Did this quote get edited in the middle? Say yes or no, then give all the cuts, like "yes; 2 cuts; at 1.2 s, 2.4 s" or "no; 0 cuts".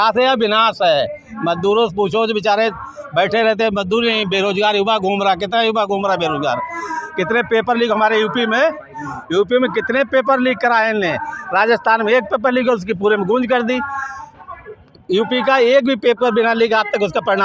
no; 0 cuts